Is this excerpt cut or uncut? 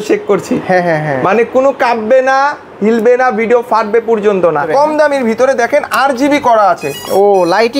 cut